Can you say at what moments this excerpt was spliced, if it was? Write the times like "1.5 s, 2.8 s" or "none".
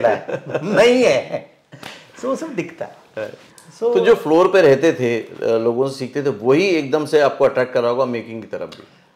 none